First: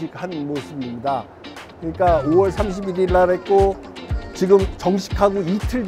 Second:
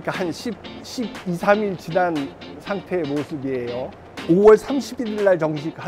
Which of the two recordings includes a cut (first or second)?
second